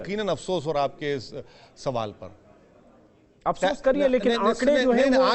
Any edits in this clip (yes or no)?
no